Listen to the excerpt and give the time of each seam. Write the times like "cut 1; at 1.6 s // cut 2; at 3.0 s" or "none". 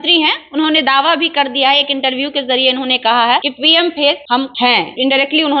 cut 1; at 3.5 s // cut 2; at 4.6 s

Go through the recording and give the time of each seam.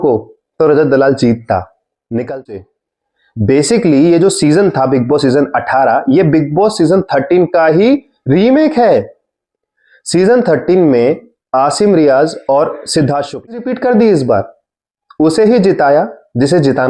cut 1; at 2.6 s // cut 2; at 13.7 s

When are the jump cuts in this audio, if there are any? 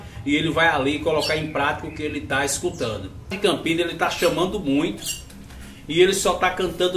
cut 1; at 3.4 s

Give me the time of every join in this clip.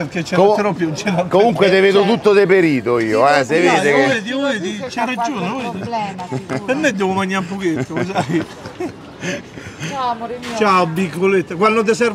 none

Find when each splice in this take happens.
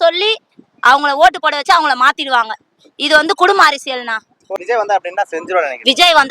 cut 1; at 4.5 s

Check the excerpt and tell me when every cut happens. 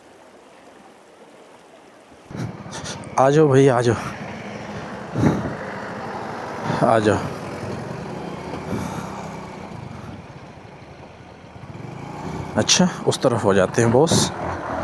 cut 1; at 2.3 s

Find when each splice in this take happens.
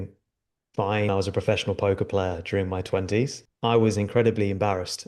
cut 1; at 1.1 s // cut 2; at 3.4 s

